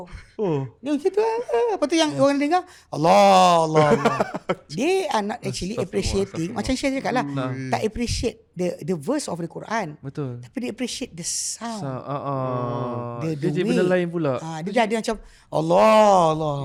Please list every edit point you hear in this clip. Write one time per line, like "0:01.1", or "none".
none